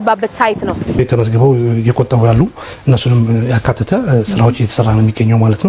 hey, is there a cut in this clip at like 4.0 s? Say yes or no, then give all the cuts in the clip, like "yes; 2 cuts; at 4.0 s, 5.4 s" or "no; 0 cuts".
no; 1 cut; at 1.0 s